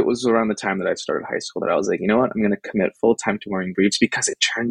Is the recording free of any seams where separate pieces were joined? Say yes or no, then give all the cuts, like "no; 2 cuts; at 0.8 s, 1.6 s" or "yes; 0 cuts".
yes; 0 cuts